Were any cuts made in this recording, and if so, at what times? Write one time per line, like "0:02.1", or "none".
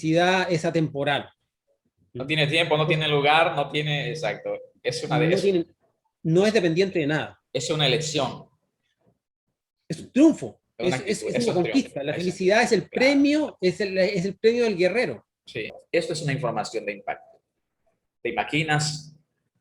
0:15.8